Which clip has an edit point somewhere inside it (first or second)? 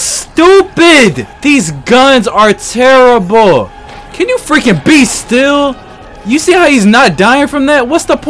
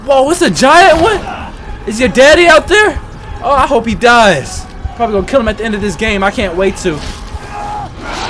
first